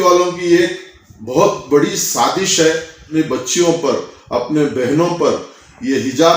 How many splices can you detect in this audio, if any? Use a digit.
1